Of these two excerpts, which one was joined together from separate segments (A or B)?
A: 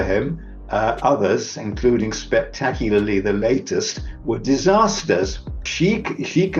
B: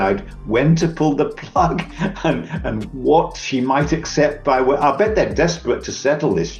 A